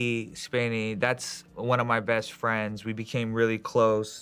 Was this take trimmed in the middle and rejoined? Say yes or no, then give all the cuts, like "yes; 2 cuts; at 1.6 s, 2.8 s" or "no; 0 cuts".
no; 0 cuts